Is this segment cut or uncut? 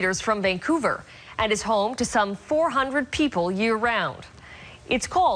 uncut